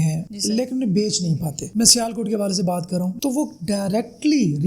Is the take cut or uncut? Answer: cut